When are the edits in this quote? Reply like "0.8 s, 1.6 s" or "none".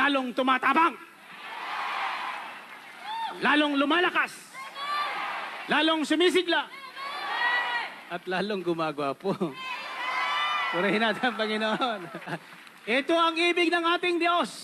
12.4 s

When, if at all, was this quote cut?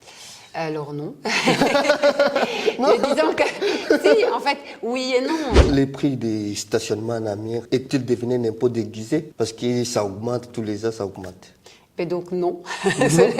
5.6 s, 7.6 s, 9.3 s

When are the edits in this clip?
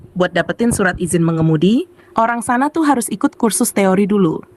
none

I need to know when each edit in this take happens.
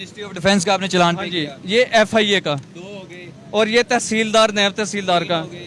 none

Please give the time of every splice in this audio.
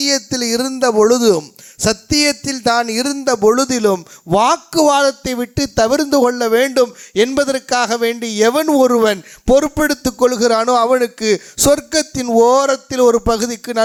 none

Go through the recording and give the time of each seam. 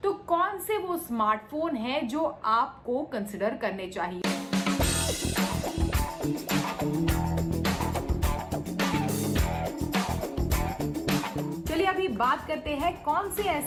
none

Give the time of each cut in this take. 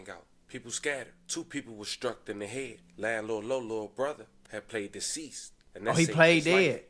none

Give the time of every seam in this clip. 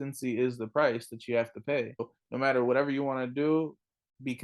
2.2 s

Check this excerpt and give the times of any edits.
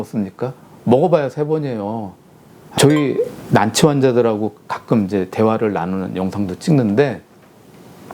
2.6 s

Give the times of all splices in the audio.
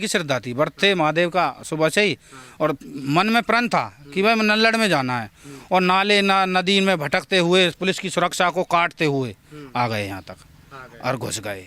none

